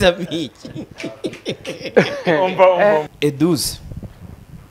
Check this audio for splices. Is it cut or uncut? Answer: cut